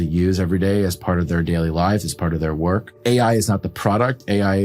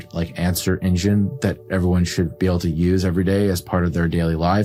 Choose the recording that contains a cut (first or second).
first